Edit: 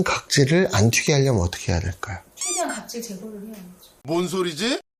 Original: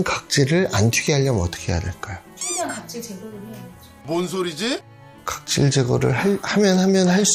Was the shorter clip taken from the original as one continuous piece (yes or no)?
yes